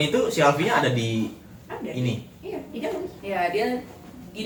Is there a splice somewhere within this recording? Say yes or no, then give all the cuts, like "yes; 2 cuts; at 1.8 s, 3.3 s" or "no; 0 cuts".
no; 0 cuts